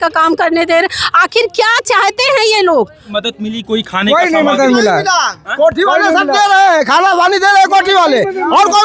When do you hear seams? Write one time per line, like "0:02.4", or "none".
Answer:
0:03.0